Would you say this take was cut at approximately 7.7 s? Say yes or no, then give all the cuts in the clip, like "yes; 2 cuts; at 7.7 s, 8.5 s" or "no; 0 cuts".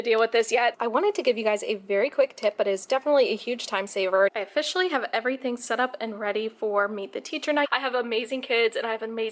yes; 3 cuts; at 0.7 s, 4.3 s, 7.7 s